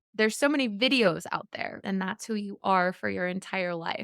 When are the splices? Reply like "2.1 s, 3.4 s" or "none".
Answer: 1.8 s